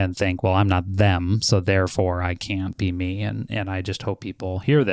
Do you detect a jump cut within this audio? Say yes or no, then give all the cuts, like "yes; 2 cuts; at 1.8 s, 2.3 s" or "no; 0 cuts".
yes; 1 cut; at 2.8 s